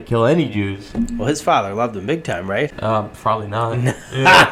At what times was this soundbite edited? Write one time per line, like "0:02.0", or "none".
0:02.8